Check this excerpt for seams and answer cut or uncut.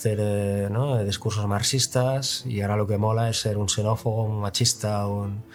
uncut